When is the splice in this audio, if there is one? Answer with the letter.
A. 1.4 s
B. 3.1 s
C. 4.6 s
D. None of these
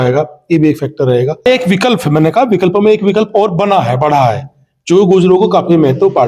A